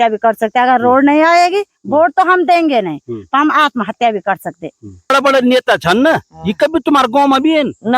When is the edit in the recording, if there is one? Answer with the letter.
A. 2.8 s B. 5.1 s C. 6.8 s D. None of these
B